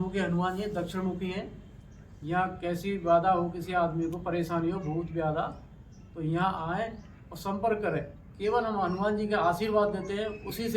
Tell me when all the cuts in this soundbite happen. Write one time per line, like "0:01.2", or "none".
none